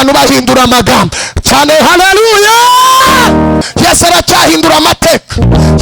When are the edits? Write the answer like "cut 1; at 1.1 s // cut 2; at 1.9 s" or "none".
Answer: cut 1; at 3.6 s